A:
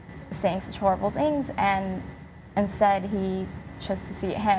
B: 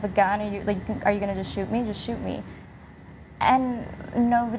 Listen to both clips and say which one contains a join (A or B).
B